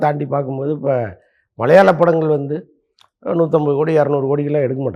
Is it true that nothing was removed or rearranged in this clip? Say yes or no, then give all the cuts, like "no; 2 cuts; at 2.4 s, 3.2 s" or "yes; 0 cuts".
yes; 0 cuts